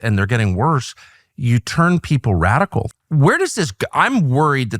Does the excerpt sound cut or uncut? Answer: cut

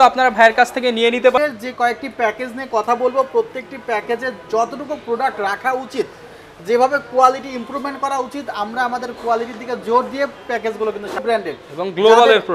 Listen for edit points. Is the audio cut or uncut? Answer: cut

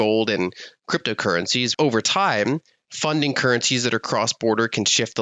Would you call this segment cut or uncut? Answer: cut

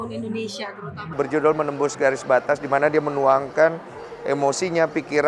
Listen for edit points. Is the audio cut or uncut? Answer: cut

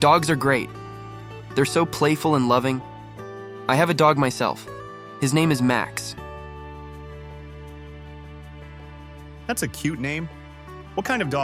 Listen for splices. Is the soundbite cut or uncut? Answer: uncut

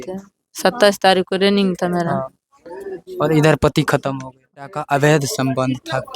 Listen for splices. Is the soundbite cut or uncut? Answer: cut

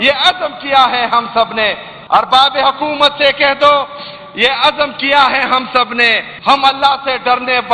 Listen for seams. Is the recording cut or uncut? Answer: cut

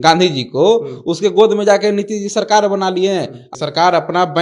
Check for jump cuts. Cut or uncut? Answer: cut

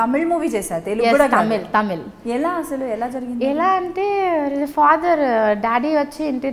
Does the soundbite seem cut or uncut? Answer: uncut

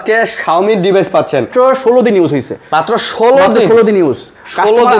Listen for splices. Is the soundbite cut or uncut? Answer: cut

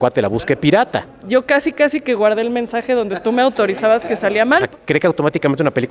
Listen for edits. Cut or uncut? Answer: cut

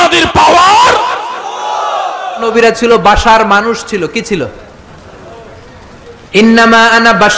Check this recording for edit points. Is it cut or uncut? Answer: cut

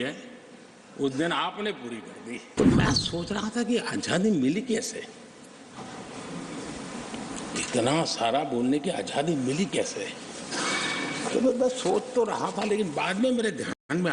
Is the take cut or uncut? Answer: cut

